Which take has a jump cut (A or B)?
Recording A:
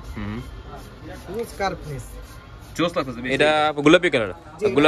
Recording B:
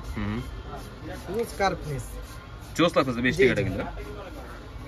A